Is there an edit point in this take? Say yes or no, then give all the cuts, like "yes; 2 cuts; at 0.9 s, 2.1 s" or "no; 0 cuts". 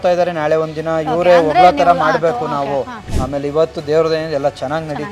yes; 1 cut; at 3.0 s